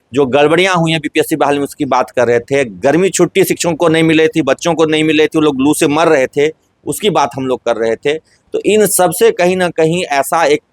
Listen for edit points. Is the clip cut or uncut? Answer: uncut